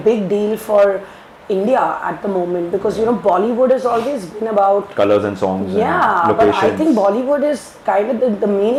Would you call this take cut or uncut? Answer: uncut